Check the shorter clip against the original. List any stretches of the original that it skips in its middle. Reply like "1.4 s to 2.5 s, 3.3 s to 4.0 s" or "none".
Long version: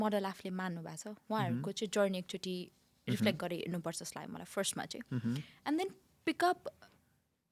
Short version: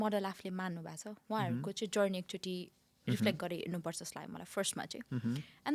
none

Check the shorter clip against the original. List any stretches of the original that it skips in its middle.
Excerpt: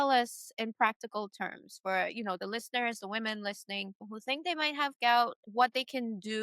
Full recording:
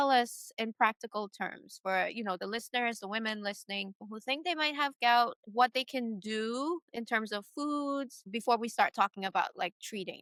none

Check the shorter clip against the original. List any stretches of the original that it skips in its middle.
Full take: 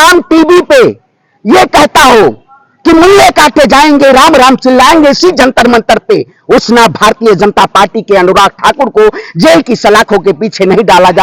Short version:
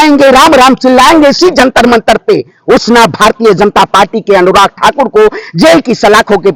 none

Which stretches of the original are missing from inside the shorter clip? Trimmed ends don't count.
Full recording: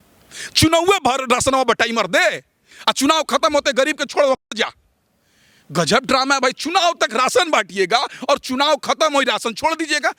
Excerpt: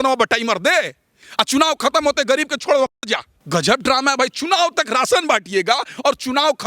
4.8 s to 5.6 s

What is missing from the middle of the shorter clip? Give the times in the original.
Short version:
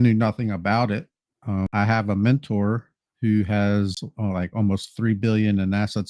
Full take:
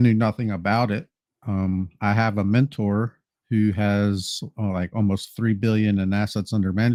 1.7 s to 2.0 s, 4.3 s to 4.4 s

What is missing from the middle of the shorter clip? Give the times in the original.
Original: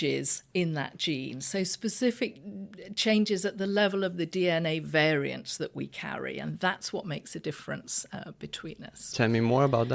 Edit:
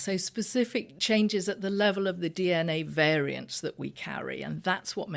2.4 s to 2.9 s

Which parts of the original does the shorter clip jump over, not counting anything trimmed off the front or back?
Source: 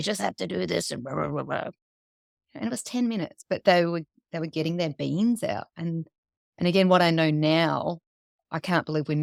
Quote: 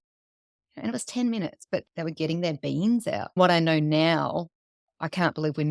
3.6 s to 4.2 s, 5.7 s to 6.9 s

